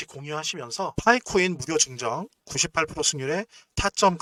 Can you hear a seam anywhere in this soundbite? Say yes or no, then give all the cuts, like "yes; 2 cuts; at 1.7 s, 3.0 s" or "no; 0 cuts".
no; 0 cuts